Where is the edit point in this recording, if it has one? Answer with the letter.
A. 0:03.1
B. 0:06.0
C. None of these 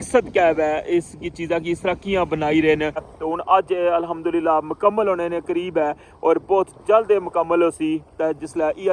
A